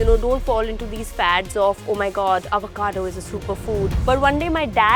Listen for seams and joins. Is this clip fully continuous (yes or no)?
no